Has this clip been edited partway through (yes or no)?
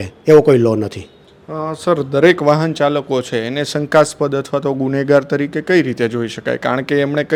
no